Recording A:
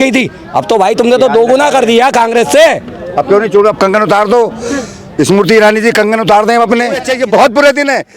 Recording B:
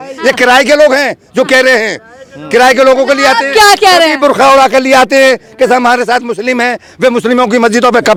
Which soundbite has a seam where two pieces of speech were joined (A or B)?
A